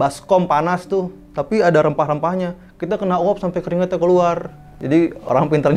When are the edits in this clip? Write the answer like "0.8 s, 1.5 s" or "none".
none